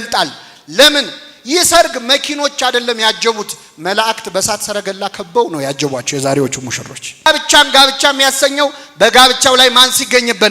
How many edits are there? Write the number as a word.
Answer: one